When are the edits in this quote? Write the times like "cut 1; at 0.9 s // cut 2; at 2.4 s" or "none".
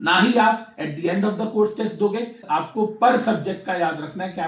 cut 1; at 2.4 s

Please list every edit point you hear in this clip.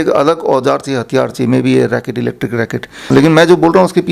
cut 1; at 3.1 s

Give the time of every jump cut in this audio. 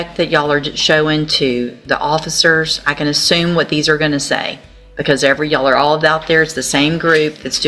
none

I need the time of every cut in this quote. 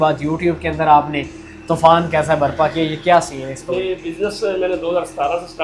none

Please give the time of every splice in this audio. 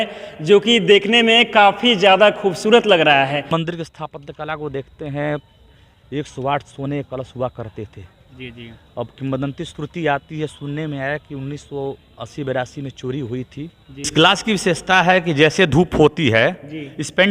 cut 1; at 3.5 s // cut 2; at 14.1 s

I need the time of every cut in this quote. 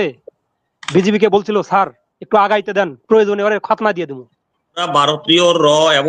cut 1; at 4.9 s

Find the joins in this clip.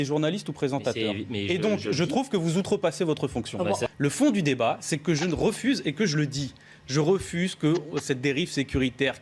none

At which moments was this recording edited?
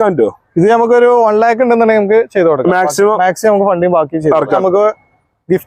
cut 1; at 4.6 s

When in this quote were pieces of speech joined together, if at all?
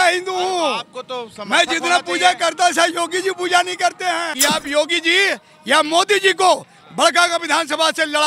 cut 1; at 4.3 s

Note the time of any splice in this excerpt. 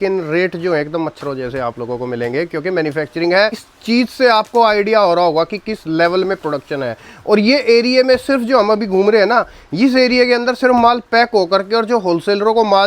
cut 1; at 3.7 s

